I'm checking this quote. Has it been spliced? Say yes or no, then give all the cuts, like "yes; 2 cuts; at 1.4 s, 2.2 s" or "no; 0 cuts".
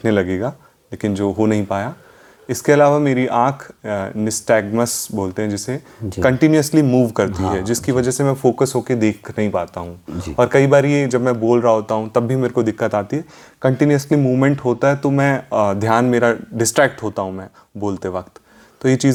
no; 0 cuts